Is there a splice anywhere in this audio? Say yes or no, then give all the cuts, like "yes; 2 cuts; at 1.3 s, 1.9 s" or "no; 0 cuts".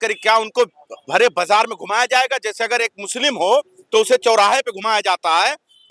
no; 0 cuts